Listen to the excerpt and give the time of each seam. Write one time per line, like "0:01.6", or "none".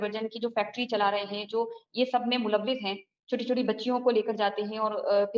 none